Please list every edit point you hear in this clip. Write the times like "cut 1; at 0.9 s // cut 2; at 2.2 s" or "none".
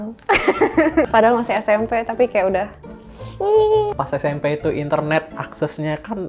cut 1; at 1.1 s // cut 2; at 3.9 s